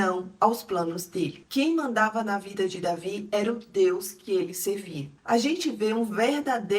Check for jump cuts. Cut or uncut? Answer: cut